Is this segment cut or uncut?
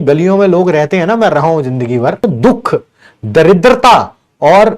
cut